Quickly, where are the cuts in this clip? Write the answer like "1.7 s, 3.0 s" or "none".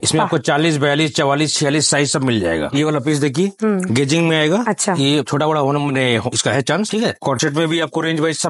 2.7 s, 7.2 s